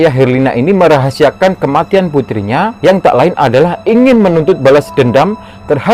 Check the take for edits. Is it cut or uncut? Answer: cut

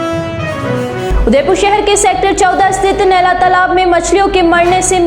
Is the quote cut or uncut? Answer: uncut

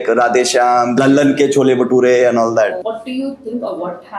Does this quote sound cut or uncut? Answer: cut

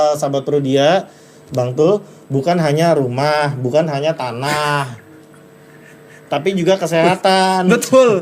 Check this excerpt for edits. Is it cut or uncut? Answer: uncut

